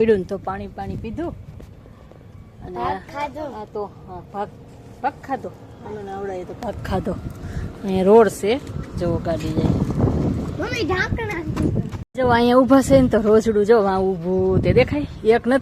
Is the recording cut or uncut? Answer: uncut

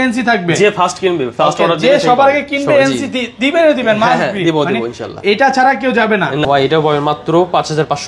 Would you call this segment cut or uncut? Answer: cut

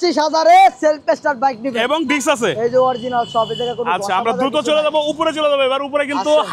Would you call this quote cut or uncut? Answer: uncut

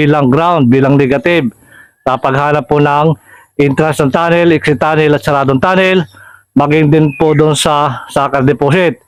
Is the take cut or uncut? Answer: uncut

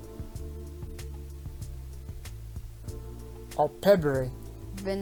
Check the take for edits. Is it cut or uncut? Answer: uncut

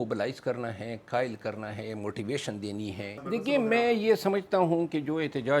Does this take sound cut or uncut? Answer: cut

